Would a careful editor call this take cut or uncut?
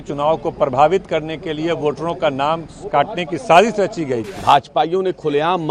cut